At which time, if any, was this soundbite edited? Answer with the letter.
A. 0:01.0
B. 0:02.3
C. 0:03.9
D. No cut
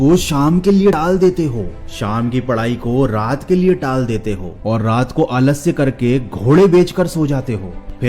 A